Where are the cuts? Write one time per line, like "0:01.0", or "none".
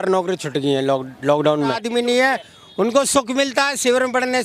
0:01.8